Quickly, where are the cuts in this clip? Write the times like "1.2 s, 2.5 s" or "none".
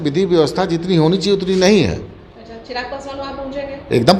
none